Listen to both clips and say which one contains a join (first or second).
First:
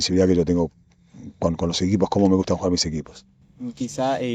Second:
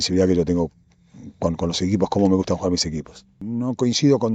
second